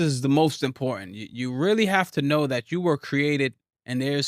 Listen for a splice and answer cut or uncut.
uncut